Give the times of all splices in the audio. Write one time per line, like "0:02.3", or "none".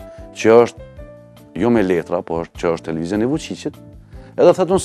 none